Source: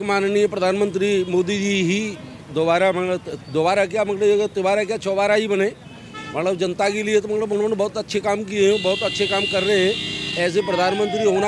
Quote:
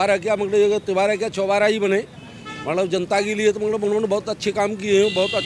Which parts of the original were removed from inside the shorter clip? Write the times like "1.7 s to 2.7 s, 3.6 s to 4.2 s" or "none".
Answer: none